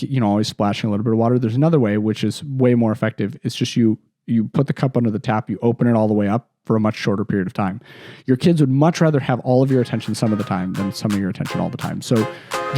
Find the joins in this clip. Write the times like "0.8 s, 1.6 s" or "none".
none

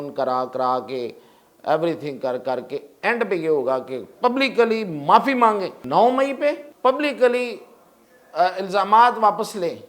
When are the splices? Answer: 5.8 s, 6.7 s

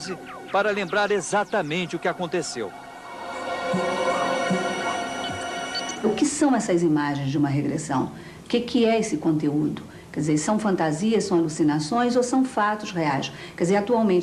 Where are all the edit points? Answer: 3.6 s

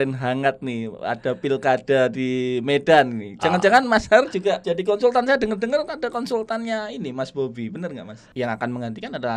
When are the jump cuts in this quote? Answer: 4.6 s, 8.1 s

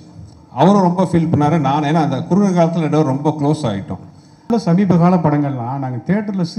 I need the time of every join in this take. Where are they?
4.5 s

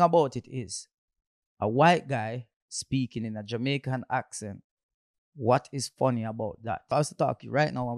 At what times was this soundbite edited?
6.9 s

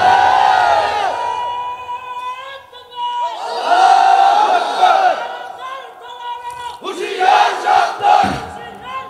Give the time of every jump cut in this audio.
none

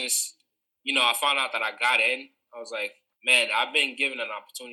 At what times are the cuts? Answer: 3.1 s

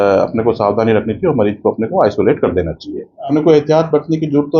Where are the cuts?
3.3 s

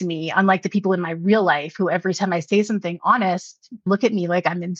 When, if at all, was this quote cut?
3.9 s

